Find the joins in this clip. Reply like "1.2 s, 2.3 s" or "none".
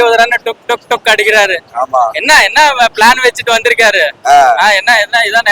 none